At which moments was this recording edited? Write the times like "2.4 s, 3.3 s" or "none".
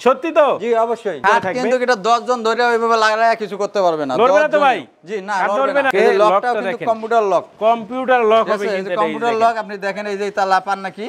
1.2 s, 5.9 s